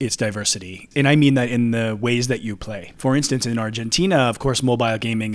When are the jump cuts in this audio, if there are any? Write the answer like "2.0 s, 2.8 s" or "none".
0.9 s, 2.8 s